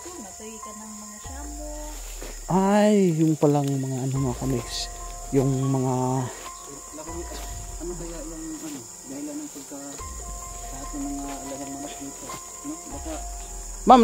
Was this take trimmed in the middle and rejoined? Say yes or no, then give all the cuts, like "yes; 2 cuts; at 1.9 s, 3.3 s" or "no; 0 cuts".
no; 0 cuts